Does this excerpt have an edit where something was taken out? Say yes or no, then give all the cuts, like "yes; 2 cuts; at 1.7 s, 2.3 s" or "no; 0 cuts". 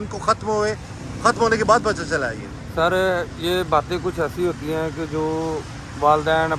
no; 0 cuts